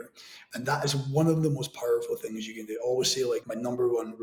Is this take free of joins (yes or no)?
yes